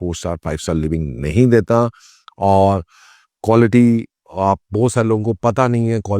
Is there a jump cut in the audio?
no; 0 cuts

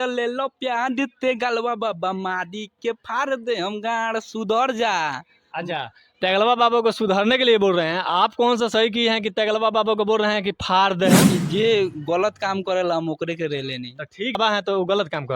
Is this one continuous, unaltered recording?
no; 2 cuts; at 11.3 s, 14.4 s

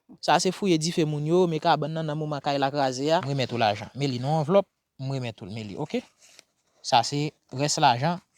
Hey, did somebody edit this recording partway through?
yes; 1 cut; at 3.3 s

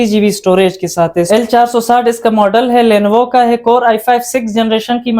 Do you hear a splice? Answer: yes; 1 cut; at 1.3 s

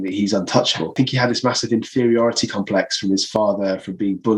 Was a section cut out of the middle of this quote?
yes; 1 cut; at 0.9 s

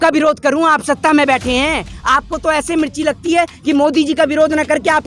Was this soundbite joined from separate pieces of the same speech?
no; 0 cuts

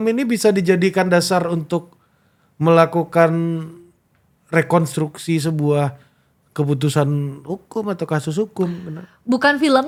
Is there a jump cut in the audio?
no; 0 cuts

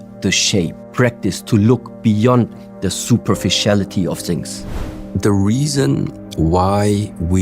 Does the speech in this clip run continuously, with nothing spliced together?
no; 1 cut; at 4.8 s

